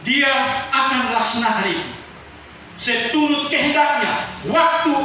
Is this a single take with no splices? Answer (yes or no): yes